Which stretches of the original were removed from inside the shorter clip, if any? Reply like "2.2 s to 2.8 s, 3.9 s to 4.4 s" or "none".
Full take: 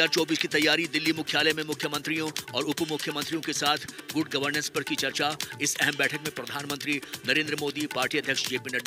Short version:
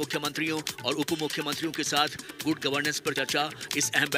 4.8 s to 5.0 s